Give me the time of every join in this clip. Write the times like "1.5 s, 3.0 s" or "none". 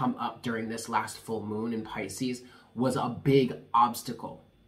none